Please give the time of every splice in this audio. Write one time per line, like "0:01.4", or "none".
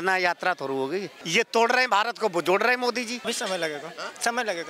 0:01.2
0:03.2